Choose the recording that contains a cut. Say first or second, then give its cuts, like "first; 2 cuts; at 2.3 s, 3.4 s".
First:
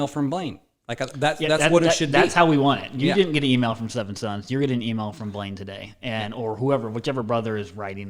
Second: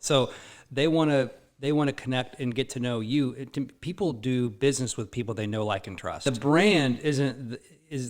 second; 1 cut; at 6.2 s